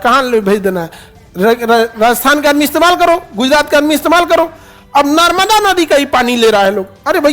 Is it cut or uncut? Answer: uncut